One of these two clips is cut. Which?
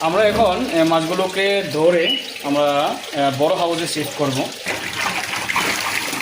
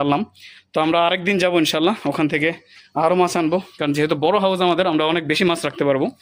first; 1 cut; at 4.6 s

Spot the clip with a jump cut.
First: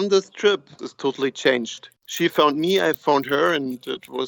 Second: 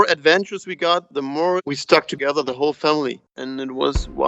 second; 1 cut; at 3.3 s

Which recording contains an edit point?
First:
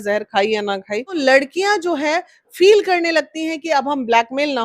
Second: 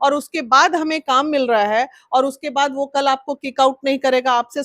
first; 1 cut; at 1.2 s

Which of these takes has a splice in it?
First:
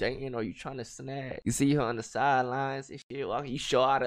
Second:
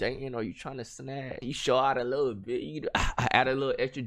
second; 1 cut; at 1.4 s

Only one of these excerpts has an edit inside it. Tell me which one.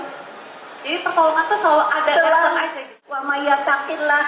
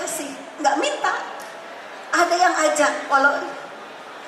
first; 1 cut; at 2.9 s

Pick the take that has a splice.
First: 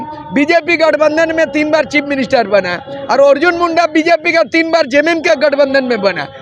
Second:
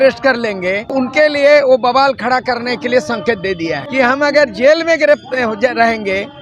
second; 2 cuts; at 0.9 s, 3.8 s

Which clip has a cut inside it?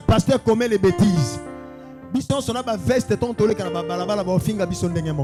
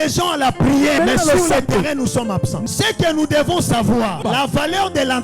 second; 3 cuts; at 1.0 s, 2.6 s, 4.2 s

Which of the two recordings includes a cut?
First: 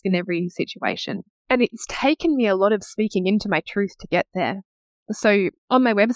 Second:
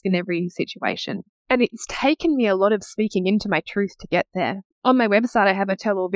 second; 1 cut; at 4.7 s

